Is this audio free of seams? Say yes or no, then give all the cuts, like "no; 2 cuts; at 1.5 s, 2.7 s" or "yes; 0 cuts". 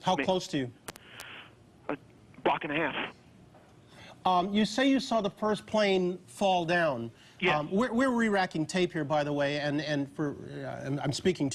no; 1 cut; at 4.4 s